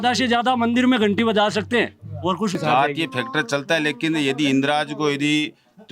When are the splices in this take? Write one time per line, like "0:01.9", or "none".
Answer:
0:02.6